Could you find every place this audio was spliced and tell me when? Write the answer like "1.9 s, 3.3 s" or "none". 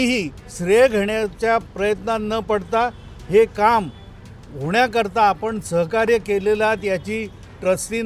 none

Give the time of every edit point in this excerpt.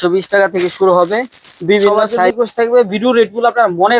2.3 s

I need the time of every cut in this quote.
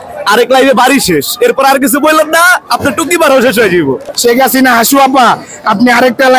4.0 s

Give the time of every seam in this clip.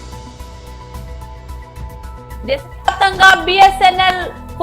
1.0 s

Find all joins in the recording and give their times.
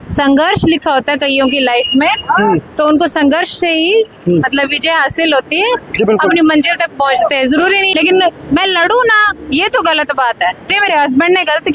7.9 s, 10.8 s

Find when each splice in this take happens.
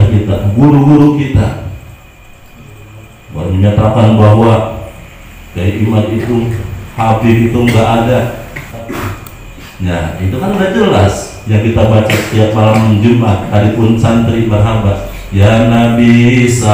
8.9 s

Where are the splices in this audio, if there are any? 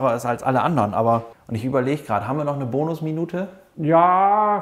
1.3 s, 3.6 s

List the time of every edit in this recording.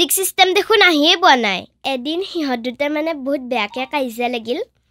1.7 s

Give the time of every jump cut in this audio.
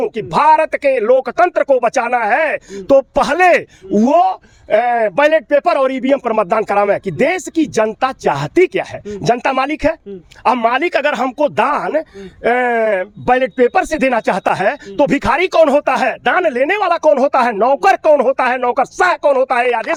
none

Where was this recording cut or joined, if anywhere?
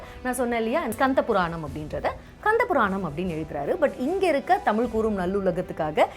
0.9 s

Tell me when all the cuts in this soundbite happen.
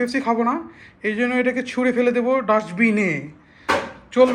none

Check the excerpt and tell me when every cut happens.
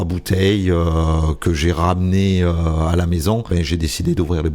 3.5 s

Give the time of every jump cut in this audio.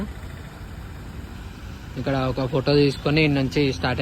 none

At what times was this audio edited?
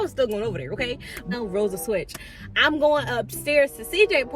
1.3 s

